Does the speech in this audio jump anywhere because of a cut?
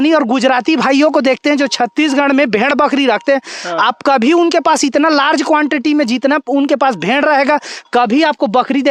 no; 0 cuts

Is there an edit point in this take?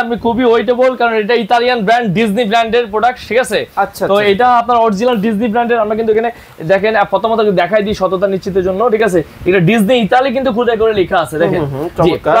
no; 0 cuts

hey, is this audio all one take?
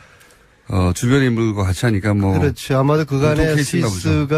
no; 1 cut; at 0.9 s

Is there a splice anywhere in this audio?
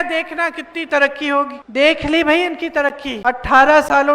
yes; 2 cuts; at 1.6 s, 3.1 s

